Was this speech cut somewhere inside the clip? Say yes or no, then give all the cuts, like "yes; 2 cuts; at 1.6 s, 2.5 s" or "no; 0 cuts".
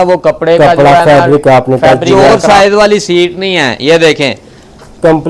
yes; 1 cut; at 2.1 s